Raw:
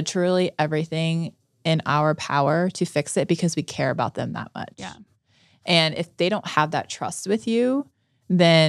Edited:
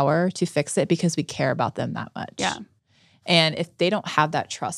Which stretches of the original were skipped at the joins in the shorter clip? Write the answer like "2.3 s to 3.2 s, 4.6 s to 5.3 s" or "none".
none